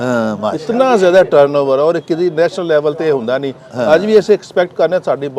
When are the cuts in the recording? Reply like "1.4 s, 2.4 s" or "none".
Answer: none